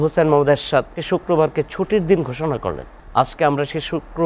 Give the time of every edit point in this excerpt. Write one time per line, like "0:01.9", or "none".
0:01.0
0:02.9